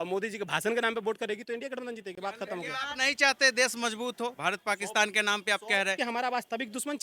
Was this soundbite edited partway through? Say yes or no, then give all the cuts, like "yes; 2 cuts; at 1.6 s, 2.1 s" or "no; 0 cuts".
no; 0 cuts